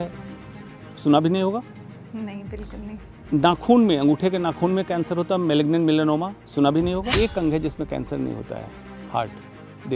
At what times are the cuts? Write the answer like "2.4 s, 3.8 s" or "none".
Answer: 7.1 s